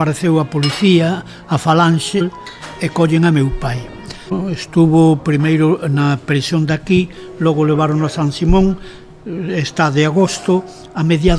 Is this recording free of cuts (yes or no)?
no